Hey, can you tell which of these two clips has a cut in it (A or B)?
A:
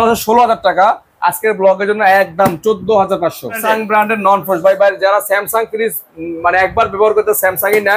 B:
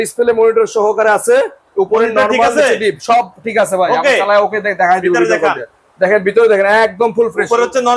A